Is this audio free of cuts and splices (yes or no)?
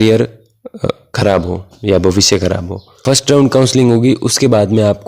no